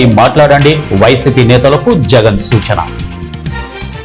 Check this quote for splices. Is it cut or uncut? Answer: uncut